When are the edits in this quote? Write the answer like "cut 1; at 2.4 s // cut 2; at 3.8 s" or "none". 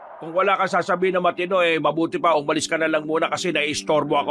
none